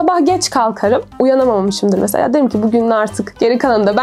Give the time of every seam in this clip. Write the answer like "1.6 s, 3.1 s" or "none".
none

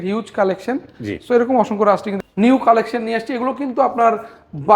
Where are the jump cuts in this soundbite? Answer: 2.1 s

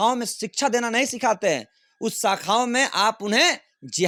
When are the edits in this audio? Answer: none

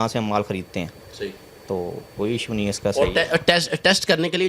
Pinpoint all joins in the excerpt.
none

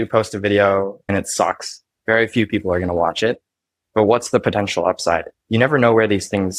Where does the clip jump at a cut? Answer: 1.0 s

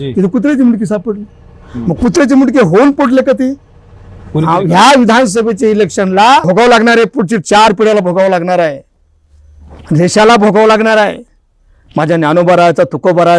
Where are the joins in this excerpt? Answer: 6.4 s

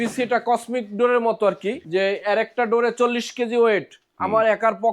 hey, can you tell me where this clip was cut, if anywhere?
1.8 s

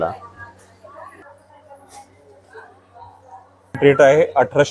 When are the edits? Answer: 1.2 s

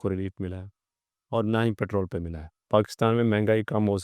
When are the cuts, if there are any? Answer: 2.6 s

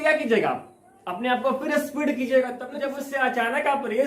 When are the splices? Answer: 3.0 s

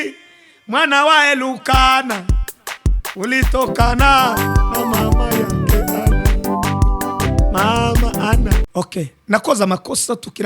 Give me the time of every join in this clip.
8.6 s

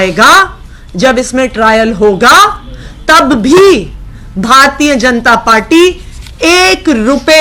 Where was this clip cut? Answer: none

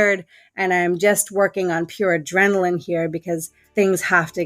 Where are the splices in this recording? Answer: 3.6 s

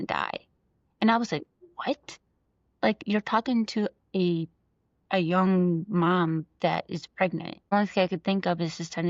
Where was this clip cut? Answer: 7.7 s

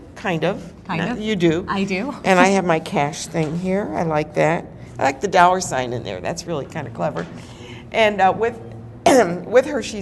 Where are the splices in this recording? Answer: none

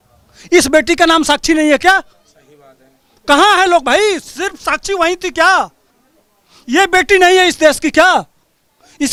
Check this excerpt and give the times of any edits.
none

